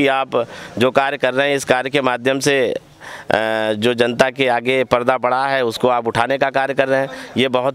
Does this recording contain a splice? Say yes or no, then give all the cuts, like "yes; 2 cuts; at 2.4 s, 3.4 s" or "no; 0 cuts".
no; 0 cuts